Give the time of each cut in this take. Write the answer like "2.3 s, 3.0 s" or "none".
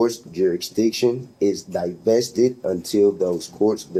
none